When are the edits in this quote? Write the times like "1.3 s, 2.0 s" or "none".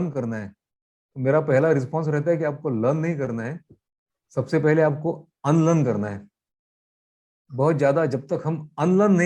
none